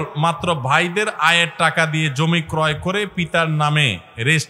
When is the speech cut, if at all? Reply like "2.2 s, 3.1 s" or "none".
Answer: none

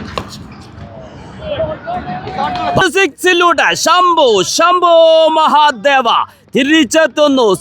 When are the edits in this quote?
2.8 s

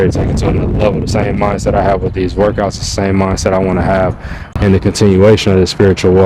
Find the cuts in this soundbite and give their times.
4.4 s

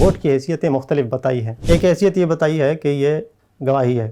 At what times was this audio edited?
1.5 s

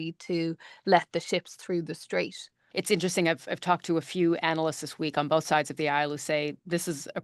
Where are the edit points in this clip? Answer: 2.6 s

